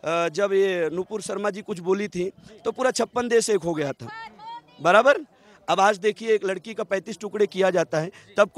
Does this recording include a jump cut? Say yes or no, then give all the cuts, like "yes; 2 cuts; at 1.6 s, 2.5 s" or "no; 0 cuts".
no; 0 cuts